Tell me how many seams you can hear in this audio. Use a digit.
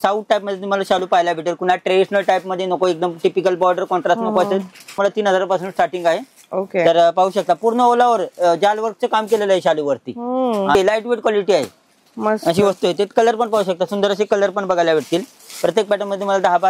2